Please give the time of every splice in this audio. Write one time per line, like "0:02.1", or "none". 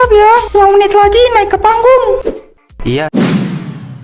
0:03.0